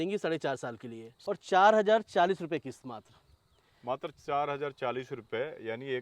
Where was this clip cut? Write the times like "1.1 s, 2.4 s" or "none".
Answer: 1.1 s